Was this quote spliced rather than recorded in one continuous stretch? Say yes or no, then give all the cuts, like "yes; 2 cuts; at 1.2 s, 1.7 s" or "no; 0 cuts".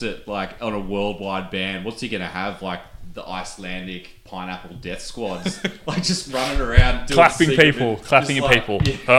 no; 0 cuts